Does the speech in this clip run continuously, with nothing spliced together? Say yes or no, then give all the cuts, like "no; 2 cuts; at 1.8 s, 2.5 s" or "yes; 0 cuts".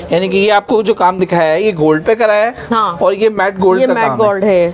yes; 0 cuts